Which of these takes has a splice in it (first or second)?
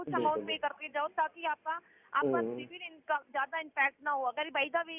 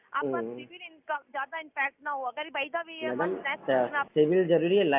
second